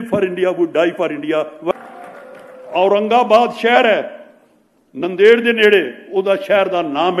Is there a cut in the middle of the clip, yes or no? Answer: yes